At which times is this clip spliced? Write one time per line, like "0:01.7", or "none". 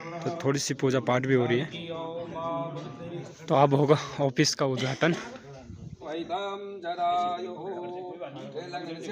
0:03.3
0:06.1